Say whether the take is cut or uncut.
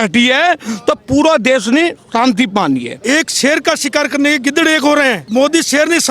cut